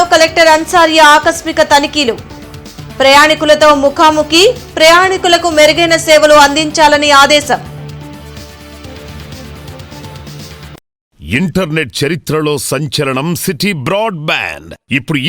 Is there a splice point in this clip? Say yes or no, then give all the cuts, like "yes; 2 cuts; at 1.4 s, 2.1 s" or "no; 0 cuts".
yes; 1 cut; at 11.2 s